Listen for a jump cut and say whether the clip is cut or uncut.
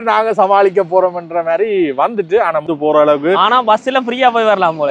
cut